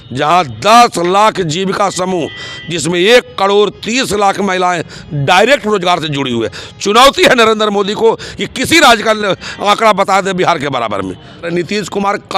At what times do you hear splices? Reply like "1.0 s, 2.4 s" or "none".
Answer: 11.4 s

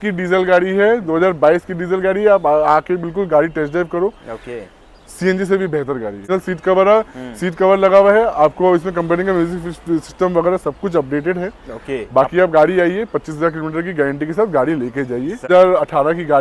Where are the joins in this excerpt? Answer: 6.3 s, 15.4 s

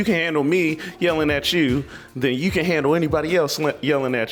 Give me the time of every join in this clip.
none

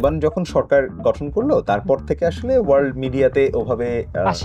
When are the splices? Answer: none

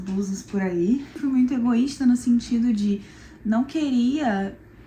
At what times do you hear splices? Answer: 1.2 s

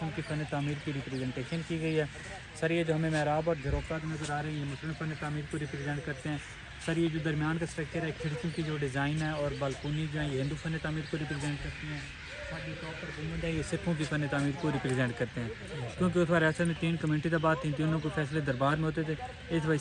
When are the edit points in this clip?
none

